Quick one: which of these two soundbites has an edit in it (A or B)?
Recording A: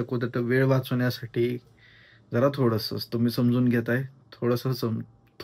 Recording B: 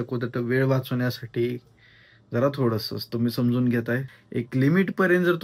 B